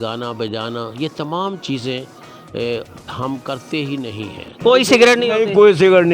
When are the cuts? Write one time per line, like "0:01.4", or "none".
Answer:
0:04.4